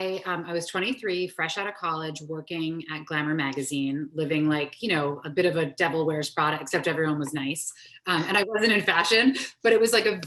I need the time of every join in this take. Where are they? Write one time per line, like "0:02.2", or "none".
none